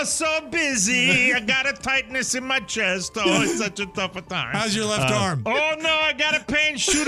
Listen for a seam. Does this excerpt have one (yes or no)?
yes